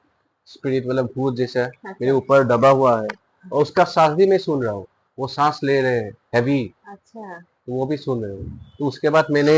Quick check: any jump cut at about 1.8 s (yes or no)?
no